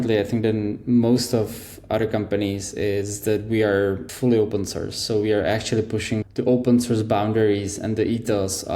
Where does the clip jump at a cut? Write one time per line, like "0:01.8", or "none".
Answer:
0:04.1
0:06.2